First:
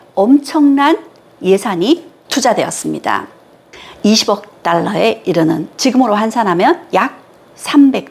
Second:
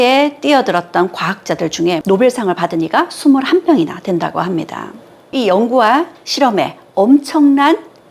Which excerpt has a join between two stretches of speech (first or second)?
second